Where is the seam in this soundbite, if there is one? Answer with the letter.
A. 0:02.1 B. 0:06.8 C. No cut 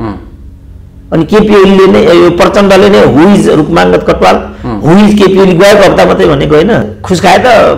B